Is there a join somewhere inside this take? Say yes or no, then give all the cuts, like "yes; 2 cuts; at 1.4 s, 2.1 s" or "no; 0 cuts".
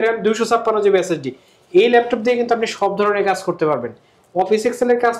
no; 0 cuts